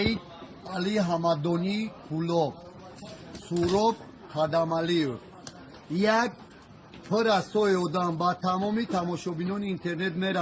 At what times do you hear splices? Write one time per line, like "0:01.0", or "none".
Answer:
0:01.6